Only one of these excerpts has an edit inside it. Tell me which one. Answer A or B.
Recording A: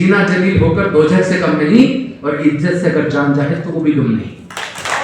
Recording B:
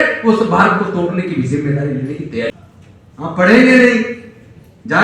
B